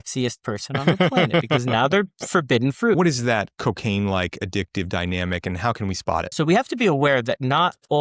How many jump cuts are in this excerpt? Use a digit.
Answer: 2